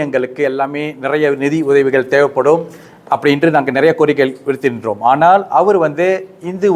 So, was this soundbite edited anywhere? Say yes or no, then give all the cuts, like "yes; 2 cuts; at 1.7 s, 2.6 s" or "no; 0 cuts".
no; 0 cuts